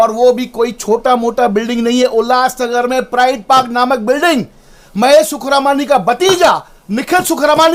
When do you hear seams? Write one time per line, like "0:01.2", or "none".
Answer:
none